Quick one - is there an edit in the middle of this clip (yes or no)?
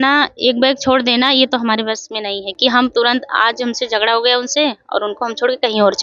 no